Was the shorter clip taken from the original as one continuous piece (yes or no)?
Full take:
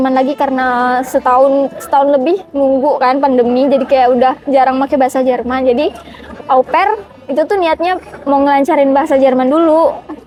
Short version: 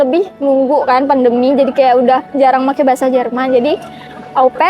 yes